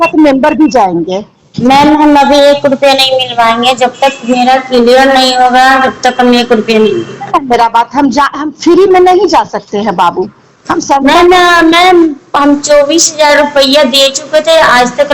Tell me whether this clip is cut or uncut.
uncut